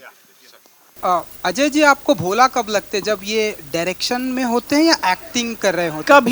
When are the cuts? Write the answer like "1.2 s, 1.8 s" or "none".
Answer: 1.0 s